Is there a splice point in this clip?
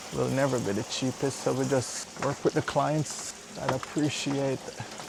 no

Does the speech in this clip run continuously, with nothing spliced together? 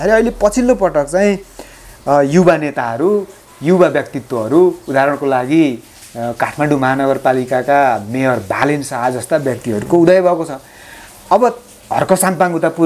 yes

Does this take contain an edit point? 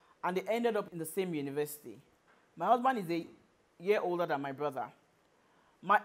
no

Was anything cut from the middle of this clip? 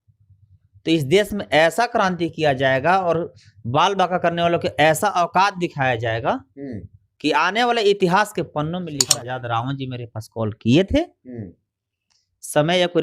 yes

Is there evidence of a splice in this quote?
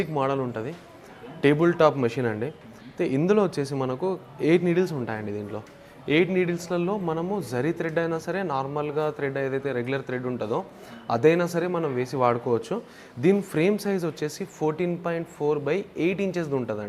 no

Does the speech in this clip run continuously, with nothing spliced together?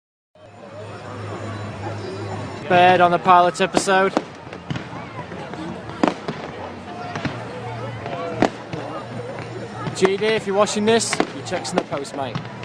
yes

